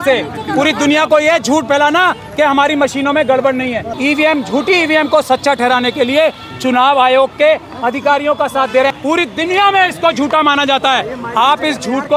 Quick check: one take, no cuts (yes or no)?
no